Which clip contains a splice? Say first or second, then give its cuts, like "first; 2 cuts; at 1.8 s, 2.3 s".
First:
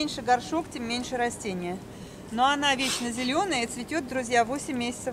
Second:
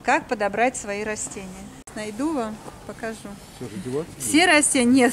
second; 1 cut; at 1.9 s